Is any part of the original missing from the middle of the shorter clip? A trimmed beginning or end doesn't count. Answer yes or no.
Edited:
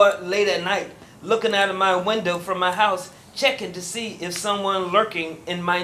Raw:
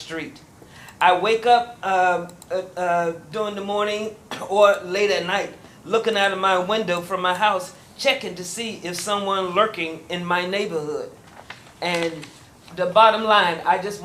no